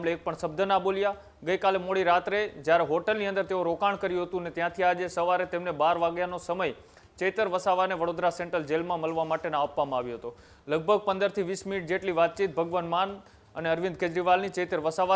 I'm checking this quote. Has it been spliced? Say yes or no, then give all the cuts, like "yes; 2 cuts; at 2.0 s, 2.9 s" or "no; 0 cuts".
no; 0 cuts